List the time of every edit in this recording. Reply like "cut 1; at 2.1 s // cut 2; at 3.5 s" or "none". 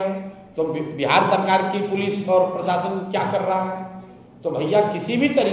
none